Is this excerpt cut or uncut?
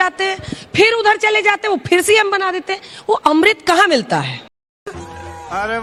uncut